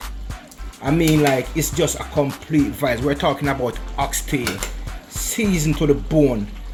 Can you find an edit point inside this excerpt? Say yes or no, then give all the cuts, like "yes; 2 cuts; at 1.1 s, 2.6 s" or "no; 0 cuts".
no; 0 cuts